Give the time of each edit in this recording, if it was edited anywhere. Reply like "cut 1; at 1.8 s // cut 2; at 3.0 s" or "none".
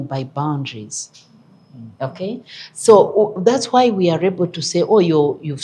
none